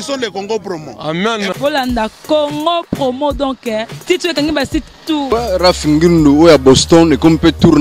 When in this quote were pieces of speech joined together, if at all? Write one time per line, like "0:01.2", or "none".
0:05.3